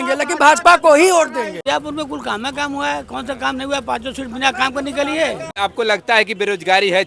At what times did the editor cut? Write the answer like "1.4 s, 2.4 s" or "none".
1.6 s, 5.5 s